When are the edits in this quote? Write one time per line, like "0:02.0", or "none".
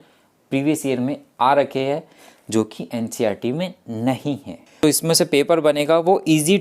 0:04.8

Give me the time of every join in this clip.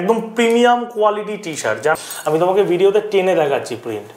0:01.9

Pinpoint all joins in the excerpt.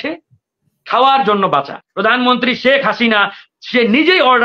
0:01.8

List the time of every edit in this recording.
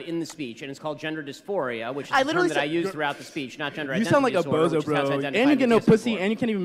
0:04.6

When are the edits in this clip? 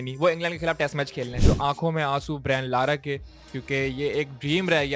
0:01.3

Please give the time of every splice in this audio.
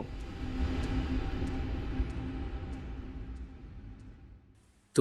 none

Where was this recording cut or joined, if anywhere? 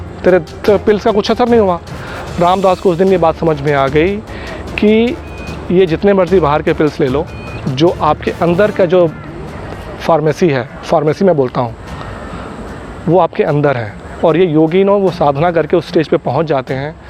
none

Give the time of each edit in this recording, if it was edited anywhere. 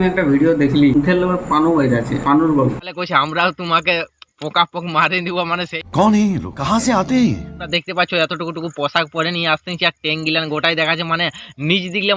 0:00.9

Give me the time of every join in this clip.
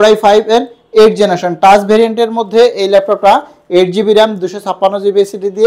none

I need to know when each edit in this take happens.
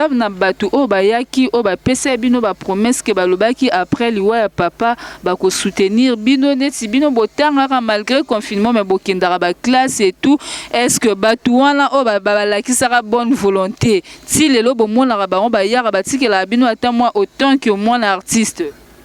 none

